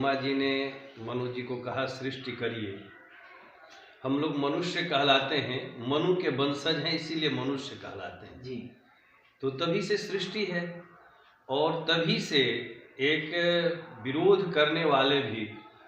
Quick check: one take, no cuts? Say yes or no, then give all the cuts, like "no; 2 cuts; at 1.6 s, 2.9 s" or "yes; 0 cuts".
yes; 0 cuts